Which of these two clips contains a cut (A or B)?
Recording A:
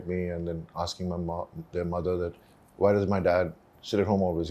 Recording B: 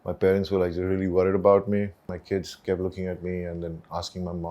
B